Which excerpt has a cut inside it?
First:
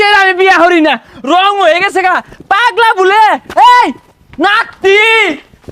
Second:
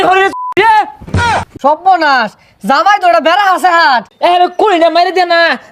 second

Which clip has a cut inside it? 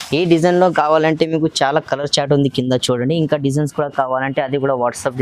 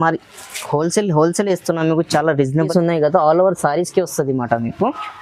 second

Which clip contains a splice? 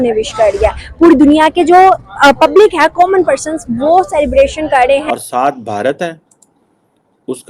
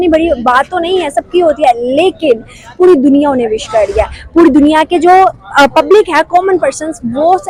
first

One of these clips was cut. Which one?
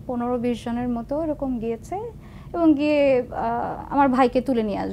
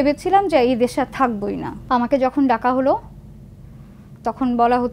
second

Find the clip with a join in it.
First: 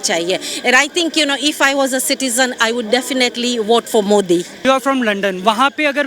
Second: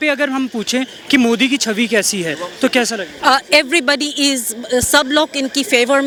first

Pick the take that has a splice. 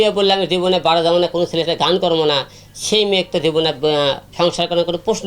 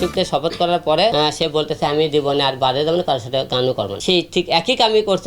second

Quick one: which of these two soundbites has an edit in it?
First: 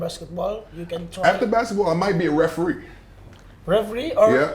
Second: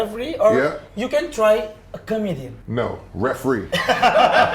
second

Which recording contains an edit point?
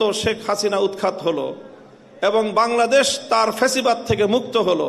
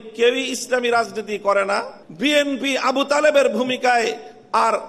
second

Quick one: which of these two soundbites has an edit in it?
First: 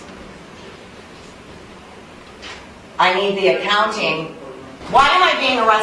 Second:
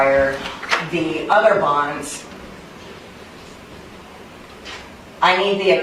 first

